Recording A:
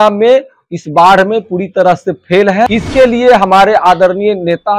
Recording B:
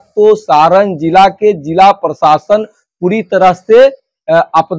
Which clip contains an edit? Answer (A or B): A